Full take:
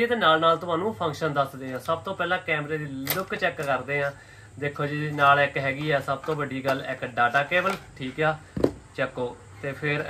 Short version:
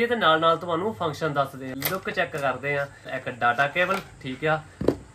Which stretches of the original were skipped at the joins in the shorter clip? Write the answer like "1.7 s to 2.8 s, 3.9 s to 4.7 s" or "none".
1.7 s to 3.0 s, 4.4 s to 6.9 s